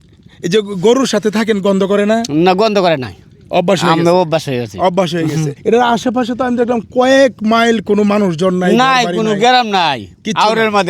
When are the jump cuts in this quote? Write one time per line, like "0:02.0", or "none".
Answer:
0:05.5

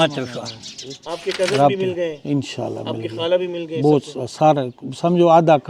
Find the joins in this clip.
0:01.1

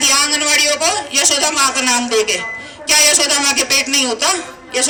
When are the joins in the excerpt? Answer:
none

